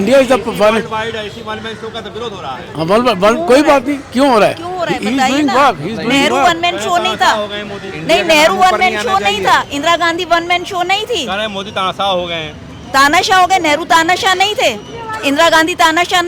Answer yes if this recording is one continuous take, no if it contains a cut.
yes